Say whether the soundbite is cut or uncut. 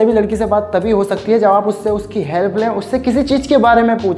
uncut